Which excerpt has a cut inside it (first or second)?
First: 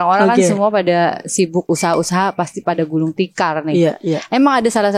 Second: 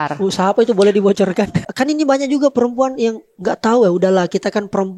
second